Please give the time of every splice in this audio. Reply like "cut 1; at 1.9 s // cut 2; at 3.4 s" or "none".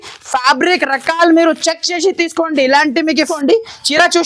cut 1; at 3.3 s